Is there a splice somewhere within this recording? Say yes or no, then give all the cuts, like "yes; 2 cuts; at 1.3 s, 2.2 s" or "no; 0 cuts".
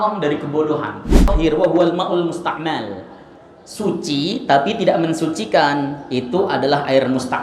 yes; 1 cut; at 1.3 s